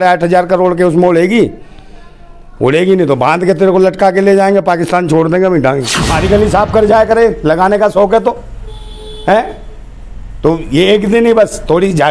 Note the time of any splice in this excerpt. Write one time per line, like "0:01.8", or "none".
0:06.0